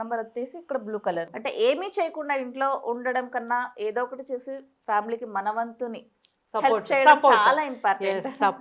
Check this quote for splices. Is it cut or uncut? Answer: cut